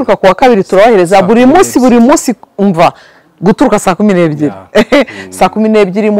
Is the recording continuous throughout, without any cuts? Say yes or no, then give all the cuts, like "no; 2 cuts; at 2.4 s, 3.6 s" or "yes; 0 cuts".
yes; 0 cuts